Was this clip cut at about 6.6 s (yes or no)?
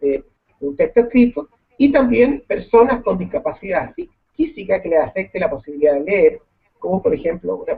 no